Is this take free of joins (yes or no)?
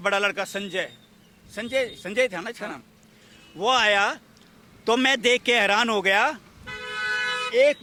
yes